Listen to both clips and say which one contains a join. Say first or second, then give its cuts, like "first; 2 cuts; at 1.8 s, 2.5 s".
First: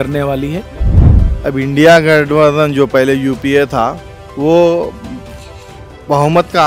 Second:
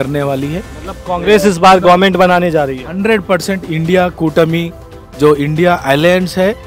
first; 1 cut; at 0.9 s